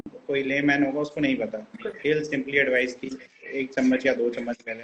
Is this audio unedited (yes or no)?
yes